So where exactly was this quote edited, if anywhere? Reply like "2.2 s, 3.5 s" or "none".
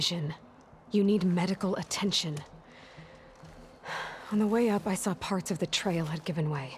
none

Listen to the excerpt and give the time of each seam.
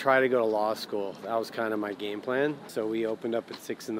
2.6 s

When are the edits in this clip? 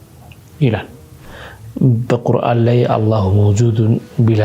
1.2 s

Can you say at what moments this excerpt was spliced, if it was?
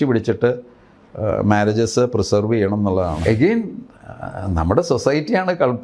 3.2 s

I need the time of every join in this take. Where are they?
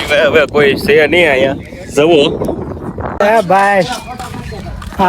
3.2 s

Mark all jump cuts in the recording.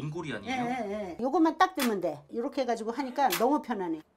1.2 s

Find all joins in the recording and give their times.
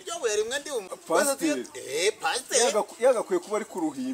0.9 s

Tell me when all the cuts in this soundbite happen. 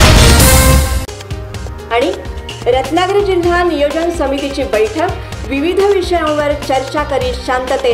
none

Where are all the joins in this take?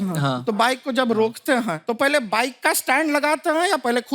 1.8 s

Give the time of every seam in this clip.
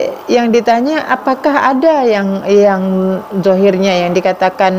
none

